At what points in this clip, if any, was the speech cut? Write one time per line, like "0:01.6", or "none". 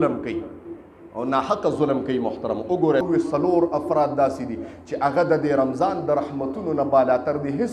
0:03.0